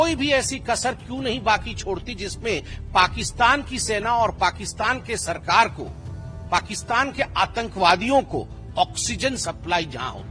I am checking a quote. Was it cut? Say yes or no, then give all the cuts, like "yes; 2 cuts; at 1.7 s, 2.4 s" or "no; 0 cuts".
no; 0 cuts